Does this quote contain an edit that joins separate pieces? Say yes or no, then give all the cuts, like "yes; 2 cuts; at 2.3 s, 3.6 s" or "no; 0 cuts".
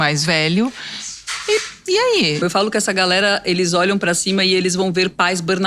yes; 1 cut; at 2.4 s